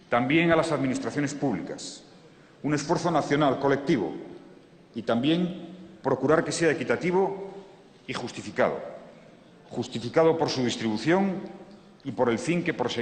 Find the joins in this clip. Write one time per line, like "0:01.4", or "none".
0:11.2